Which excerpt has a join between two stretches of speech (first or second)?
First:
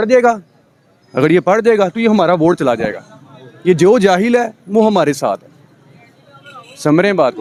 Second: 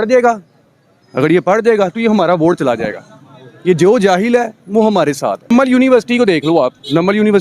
second